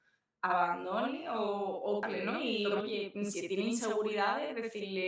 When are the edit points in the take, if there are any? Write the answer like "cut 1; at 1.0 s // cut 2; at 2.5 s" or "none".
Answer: cut 1; at 2.4 s